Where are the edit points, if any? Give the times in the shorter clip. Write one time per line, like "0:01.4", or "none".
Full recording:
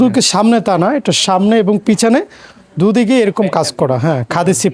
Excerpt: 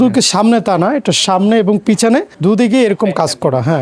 0:02.3